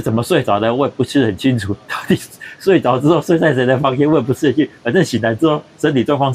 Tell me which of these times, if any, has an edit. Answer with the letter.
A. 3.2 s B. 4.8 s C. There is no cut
C